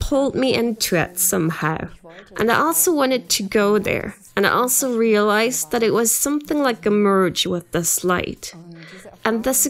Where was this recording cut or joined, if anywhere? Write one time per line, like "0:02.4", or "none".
none